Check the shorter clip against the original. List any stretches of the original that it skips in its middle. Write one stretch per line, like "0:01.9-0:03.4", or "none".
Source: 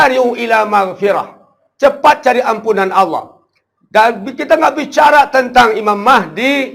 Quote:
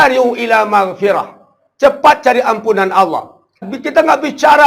0:03.7-0:04.3